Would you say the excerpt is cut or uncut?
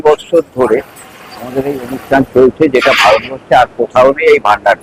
uncut